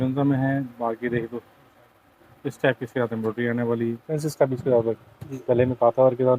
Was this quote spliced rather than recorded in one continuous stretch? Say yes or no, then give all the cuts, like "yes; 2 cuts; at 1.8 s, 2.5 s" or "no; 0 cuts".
yes; 1 cut; at 4.1 s